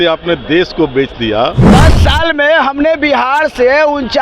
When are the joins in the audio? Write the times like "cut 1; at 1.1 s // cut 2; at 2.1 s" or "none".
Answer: cut 1; at 1.7 s